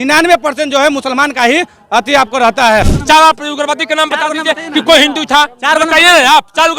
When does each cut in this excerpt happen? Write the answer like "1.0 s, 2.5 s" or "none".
2.9 s